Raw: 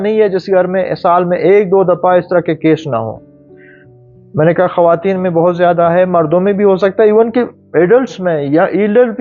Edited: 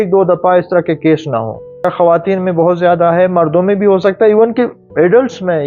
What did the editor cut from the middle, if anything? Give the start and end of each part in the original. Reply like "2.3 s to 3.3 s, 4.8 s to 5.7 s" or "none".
3.4 s to 4.6 s